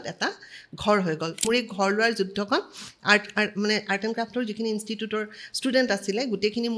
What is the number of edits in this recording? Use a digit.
1